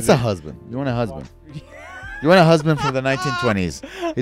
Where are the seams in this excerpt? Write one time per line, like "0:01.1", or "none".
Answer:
none